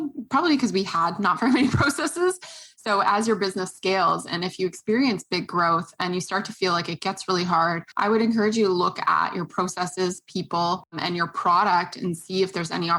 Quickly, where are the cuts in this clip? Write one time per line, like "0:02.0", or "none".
0:07.8
0:11.0

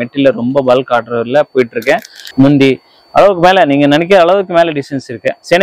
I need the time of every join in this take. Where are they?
0:02.2

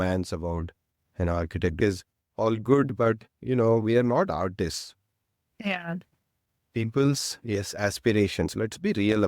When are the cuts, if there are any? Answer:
0:01.8

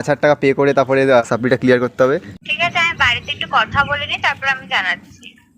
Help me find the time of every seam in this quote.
0:01.2
0:02.3

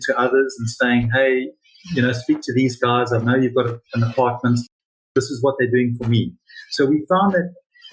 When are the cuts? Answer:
none

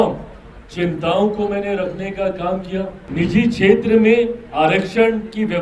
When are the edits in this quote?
0:03.0

